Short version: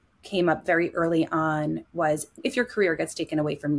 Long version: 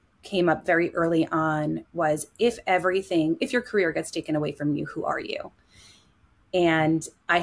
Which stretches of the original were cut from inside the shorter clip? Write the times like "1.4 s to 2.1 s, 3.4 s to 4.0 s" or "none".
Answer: 2.4 s to 3.4 s